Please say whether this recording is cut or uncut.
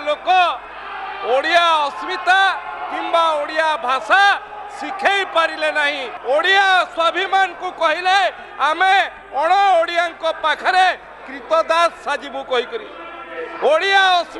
cut